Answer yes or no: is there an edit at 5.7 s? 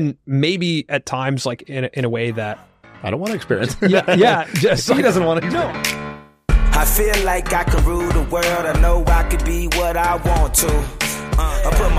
yes